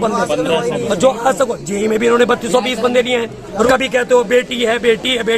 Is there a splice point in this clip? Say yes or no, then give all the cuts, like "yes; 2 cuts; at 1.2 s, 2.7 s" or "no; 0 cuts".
yes; 1 cut; at 3.7 s